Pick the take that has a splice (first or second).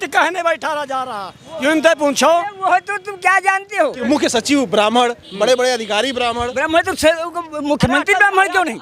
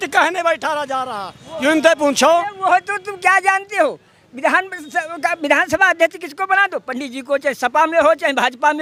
first